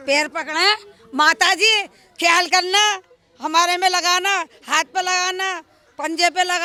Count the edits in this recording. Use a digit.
0